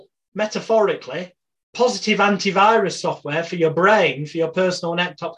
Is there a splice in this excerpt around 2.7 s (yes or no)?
no